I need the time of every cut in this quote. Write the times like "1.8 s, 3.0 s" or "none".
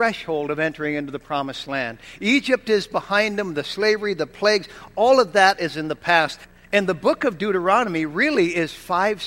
6.4 s